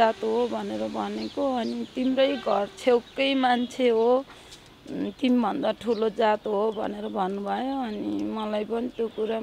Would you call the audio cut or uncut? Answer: uncut